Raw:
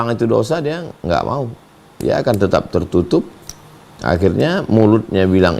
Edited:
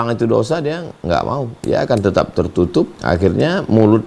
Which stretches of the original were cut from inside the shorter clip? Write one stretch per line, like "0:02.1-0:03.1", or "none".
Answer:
0:01.5-0:01.9
0:03.3-0:04.0